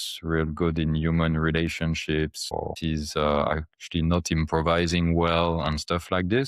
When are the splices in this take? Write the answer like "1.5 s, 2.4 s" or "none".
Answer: 2.7 s